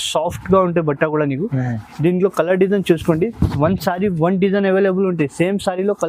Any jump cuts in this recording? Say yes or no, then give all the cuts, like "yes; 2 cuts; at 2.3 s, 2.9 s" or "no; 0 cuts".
no; 0 cuts